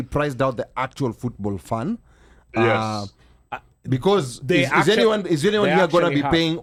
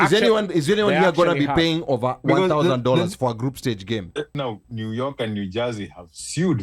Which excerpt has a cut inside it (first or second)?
second